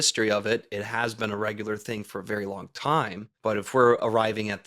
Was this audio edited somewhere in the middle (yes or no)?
yes